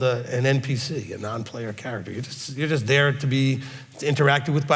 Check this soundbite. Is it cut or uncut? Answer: uncut